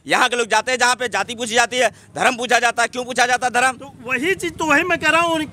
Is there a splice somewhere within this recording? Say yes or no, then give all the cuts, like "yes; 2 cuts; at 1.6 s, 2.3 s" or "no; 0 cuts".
no; 0 cuts